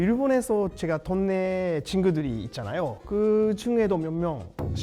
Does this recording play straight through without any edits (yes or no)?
yes